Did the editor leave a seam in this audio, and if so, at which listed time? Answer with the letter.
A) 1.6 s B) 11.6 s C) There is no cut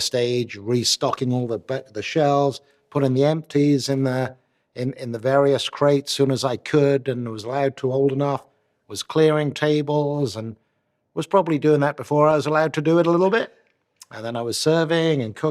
C